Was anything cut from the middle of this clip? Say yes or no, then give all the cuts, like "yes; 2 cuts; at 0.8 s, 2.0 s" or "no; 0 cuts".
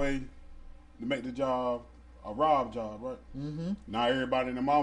no; 0 cuts